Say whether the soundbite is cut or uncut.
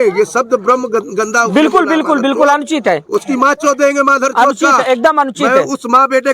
uncut